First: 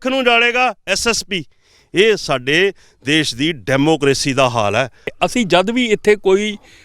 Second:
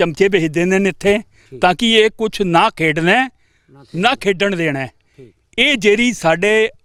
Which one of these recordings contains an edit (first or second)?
first